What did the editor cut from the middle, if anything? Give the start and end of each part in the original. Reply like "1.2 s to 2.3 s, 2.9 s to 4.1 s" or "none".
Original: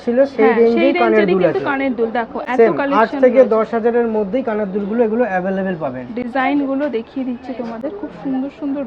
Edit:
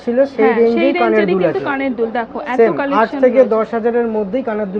none